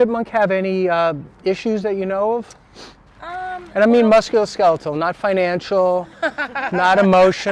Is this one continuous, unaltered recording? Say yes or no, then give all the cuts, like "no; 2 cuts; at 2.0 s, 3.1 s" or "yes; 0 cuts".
yes; 0 cuts